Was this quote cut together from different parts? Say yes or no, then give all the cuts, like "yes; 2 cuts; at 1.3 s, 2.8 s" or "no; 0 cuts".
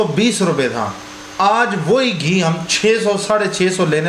no; 0 cuts